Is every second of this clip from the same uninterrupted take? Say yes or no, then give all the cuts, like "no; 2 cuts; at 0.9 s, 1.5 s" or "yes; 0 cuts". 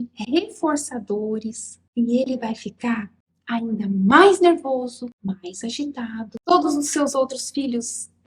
no; 2 cuts; at 5.1 s, 6.3 s